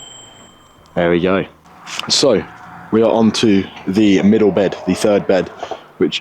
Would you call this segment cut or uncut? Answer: uncut